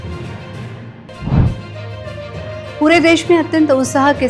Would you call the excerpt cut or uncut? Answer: uncut